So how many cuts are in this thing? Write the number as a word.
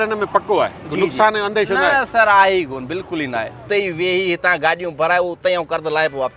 one